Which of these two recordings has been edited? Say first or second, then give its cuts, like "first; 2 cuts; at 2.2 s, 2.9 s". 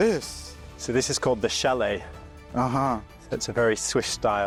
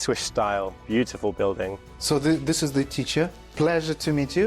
second; 1 cut; at 1.9 s